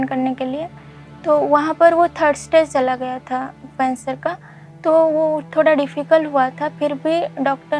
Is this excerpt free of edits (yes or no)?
yes